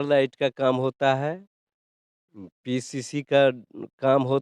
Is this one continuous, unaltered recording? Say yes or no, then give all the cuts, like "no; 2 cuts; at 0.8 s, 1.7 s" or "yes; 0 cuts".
yes; 0 cuts